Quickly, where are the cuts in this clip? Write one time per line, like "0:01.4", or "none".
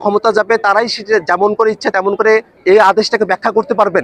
0:02.5

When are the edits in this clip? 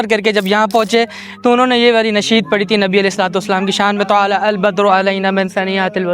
none

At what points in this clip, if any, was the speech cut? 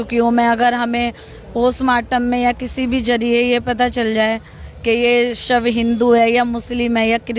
none

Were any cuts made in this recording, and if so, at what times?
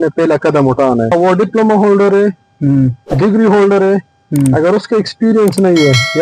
0:01.1

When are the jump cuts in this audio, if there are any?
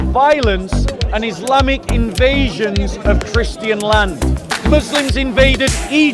0:04.5

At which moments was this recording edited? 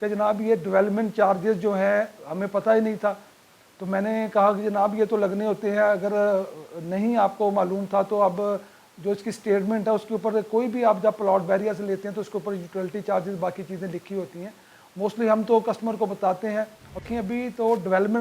0:17.0

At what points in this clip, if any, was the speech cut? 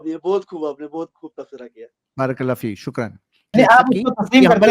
0:03.5

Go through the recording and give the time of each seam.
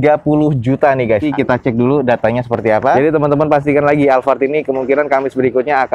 0:01.2
0:03.0

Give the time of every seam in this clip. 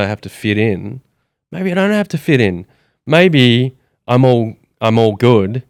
none

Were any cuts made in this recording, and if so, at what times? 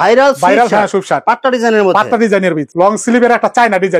0:02.7

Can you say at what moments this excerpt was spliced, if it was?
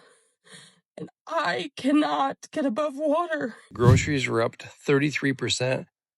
0:03.7

